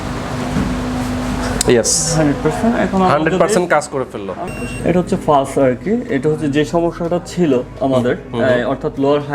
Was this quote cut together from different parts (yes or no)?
yes